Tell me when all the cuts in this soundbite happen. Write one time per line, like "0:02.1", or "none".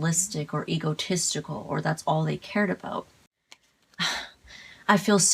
0:03.2